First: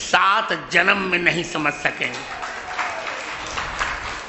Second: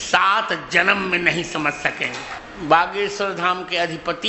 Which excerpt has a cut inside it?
second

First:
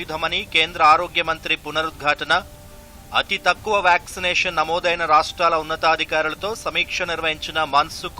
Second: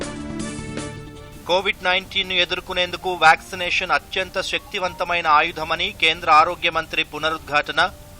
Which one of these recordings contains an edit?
second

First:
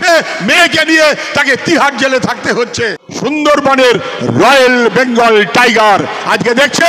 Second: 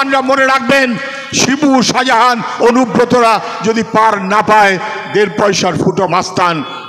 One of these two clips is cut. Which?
first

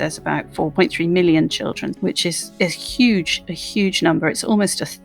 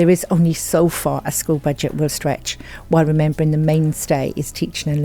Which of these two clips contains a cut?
first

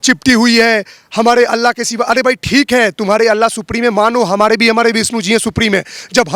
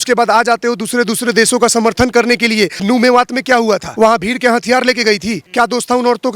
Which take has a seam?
second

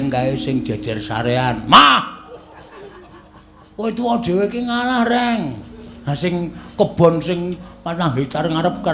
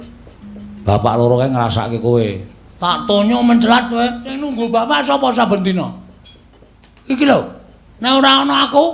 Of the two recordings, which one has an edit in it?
second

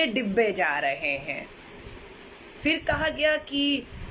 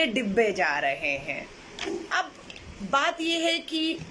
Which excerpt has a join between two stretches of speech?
second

